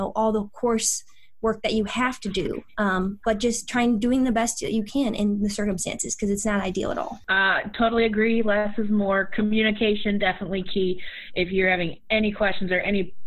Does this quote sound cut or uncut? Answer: uncut